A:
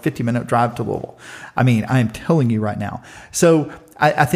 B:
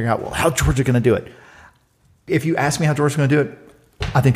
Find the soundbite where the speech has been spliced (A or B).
B